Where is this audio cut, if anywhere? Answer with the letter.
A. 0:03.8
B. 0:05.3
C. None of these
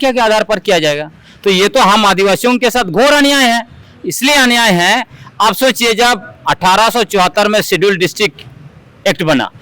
C